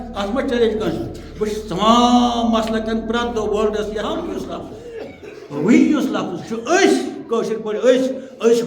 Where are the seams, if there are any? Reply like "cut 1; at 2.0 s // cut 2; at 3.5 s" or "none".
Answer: cut 1; at 4.5 s